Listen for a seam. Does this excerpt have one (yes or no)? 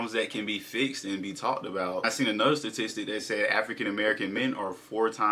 yes